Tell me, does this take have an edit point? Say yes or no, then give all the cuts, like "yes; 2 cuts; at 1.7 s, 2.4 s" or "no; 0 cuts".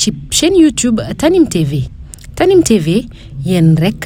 no; 0 cuts